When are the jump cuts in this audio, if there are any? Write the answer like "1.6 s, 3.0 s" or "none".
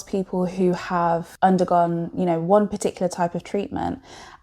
1.3 s